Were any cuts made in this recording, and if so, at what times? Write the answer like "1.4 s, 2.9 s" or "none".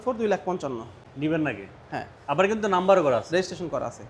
none